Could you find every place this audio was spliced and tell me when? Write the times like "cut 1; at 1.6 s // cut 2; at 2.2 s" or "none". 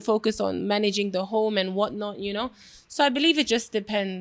none